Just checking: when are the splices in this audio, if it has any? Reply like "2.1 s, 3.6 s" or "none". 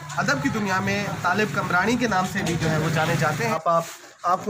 3.5 s